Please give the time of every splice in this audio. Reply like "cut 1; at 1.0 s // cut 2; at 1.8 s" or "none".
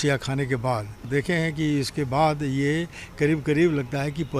cut 1; at 1.0 s